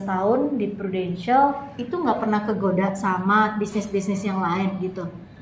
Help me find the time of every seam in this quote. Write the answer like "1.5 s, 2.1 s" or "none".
none